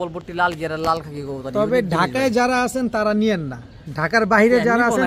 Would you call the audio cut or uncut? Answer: uncut